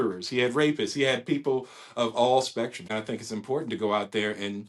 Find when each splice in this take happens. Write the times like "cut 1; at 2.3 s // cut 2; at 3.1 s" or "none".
cut 1; at 2.9 s